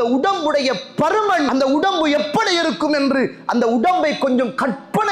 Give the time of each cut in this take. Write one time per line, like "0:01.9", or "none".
0:01.5